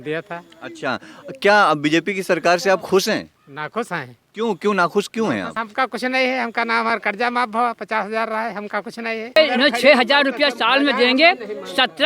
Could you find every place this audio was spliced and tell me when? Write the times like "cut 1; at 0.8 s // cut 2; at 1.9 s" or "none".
cut 1; at 5.5 s // cut 2; at 9.4 s